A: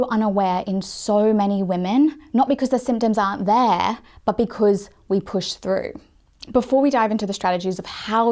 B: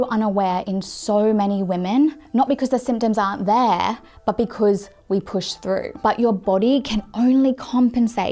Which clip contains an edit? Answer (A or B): B